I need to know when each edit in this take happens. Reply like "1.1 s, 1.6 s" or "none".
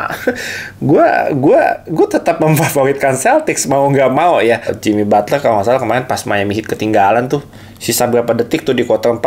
4.8 s

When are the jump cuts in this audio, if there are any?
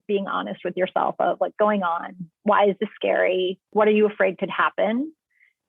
1.5 s, 3.7 s

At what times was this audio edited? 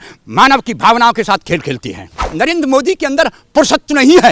2.2 s

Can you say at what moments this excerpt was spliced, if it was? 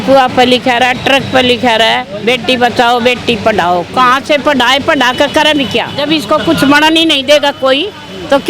5.9 s

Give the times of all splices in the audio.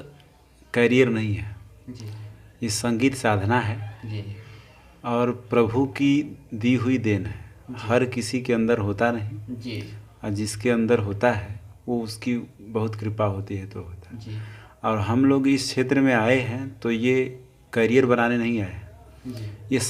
none

